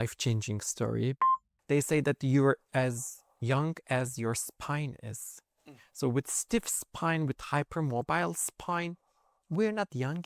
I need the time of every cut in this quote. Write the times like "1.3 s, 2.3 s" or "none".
1.2 s